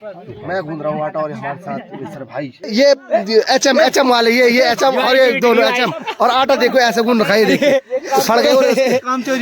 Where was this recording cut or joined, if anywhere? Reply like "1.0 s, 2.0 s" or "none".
2.6 s